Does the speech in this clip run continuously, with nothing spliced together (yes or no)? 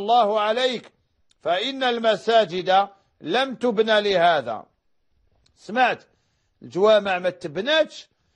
no